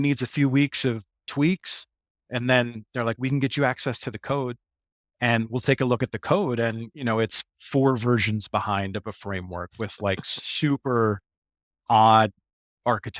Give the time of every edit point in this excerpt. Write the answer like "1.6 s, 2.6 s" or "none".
1.2 s, 2.2 s